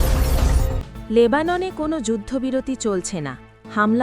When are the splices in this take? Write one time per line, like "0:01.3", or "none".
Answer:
0:00.9